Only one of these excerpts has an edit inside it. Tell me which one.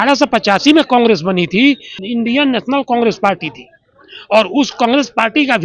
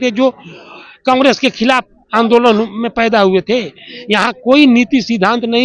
first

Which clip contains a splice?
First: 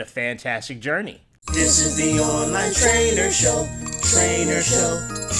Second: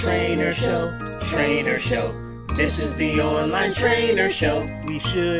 first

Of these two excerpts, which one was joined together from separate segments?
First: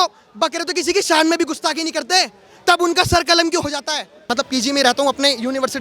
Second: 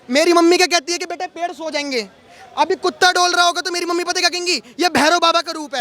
first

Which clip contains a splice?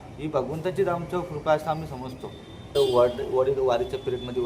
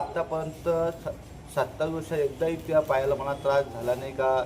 first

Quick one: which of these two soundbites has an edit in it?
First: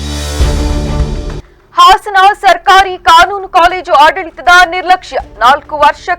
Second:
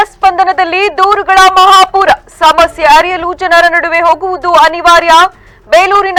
first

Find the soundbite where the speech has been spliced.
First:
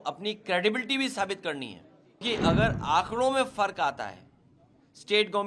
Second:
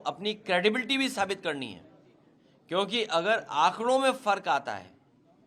first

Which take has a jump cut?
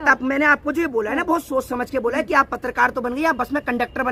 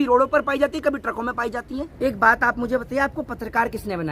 second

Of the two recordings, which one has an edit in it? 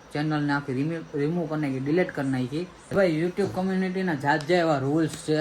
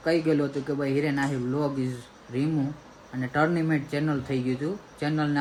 first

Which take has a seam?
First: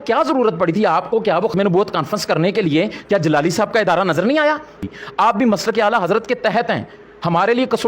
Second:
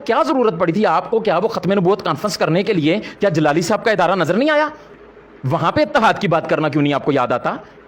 first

